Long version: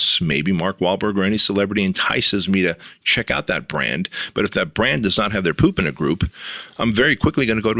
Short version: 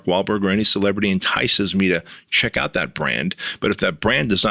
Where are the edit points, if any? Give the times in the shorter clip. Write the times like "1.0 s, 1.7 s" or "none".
none

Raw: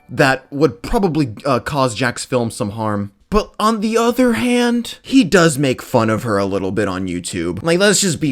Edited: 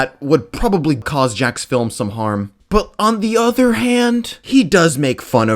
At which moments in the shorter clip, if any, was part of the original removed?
1.1 s

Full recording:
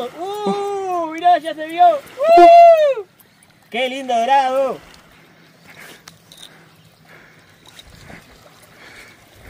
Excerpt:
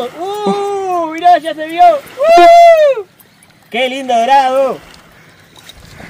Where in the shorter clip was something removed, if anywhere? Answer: 5.2 s

